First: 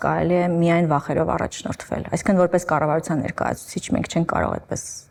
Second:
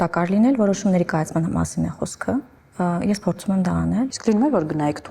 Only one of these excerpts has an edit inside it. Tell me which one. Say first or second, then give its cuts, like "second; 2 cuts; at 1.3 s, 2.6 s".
second; 2 cuts; at 2.6 s, 4.1 s